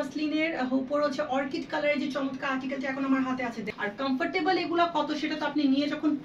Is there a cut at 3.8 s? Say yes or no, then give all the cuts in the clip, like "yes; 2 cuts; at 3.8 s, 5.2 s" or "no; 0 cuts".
yes; 1 cut; at 3.8 s